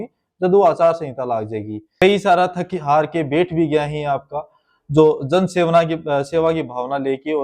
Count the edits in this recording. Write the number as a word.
one